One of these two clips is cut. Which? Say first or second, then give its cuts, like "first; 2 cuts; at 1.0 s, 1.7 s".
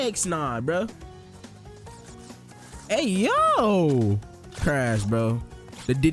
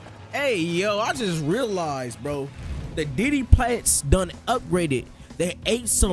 first; 1 cut; at 1.1 s